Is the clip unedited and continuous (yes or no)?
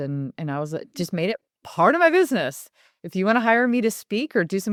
yes